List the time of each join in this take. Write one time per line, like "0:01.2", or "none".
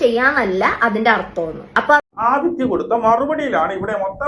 0:02.0